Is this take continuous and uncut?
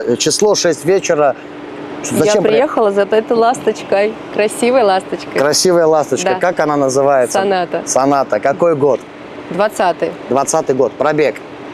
yes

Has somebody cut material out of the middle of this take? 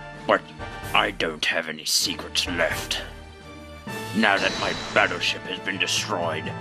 yes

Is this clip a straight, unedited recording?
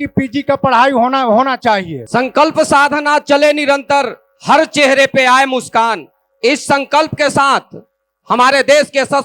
no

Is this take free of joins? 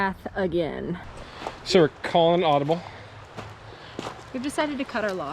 no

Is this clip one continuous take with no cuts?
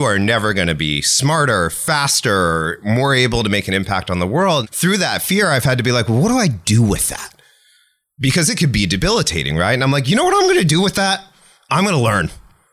no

